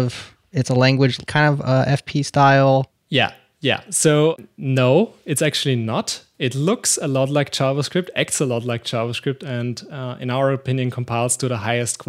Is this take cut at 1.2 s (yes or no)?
yes